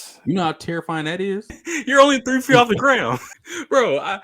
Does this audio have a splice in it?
yes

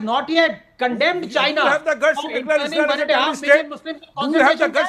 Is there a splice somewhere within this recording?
no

